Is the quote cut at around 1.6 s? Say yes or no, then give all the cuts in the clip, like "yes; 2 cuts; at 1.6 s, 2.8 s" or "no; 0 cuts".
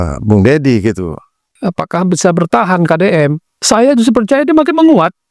yes; 1 cut; at 1.6 s